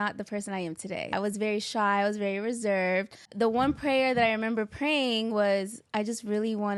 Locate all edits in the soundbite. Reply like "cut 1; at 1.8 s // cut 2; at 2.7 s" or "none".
cut 1; at 1.1 s // cut 2; at 3.2 s